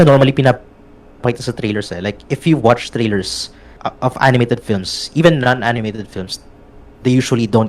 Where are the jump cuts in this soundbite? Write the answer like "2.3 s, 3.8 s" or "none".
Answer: 3.8 s